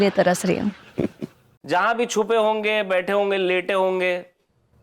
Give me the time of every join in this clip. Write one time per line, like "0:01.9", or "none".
0:01.5